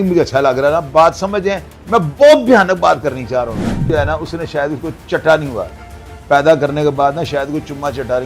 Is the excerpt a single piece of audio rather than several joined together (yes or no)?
no